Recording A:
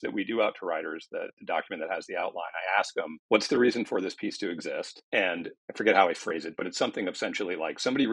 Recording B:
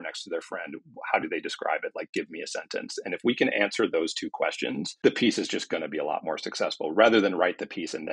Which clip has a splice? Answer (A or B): A